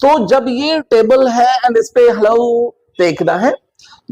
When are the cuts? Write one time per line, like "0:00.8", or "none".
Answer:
none